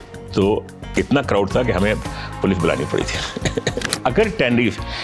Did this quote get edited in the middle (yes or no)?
yes